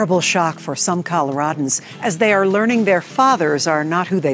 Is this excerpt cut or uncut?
uncut